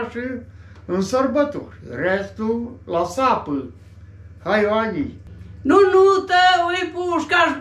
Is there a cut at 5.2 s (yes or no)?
yes